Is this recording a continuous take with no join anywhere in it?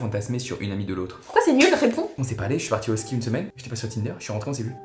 no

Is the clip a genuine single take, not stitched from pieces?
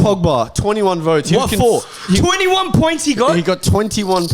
yes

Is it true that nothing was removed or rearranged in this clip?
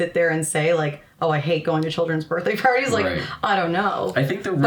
yes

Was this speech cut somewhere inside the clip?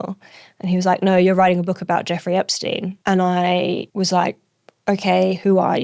yes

